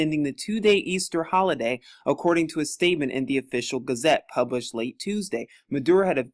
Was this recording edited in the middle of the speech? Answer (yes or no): yes